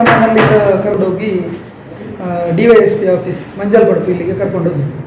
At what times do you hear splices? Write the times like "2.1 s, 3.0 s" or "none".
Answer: 0.9 s